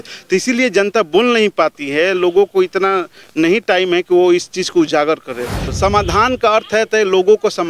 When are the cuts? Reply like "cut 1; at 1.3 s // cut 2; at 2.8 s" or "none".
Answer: cut 1; at 5.7 s